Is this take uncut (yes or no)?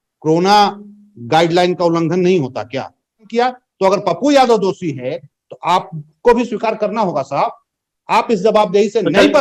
no